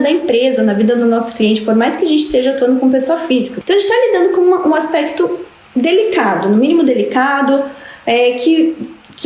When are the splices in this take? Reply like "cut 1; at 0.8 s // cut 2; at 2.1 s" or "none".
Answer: cut 1; at 3.5 s